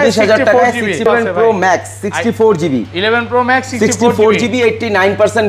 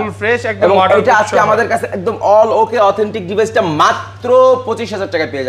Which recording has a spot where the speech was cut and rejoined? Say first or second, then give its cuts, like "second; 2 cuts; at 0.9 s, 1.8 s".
first; 1 cut; at 1.1 s